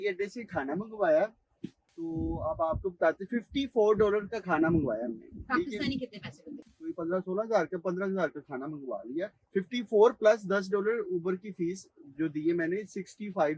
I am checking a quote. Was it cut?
no; 0 cuts

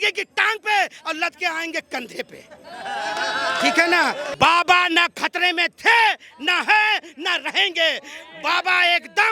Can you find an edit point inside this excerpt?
yes; 1 cut; at 4.3 s

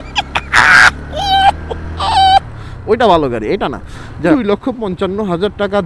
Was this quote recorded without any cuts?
no; 1 cut; at 4.3 s

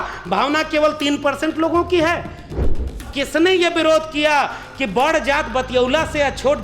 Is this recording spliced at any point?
yes; 1 cut; at 2.7 s

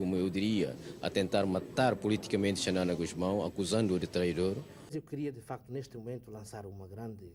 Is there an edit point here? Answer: yes; 1 cut; at 5.0 s

